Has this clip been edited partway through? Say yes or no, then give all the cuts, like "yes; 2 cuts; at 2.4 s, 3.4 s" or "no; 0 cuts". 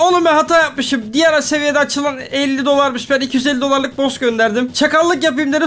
no; 0 cuts